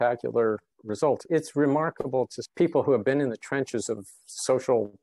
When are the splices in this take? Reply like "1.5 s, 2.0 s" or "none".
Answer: 1.2 s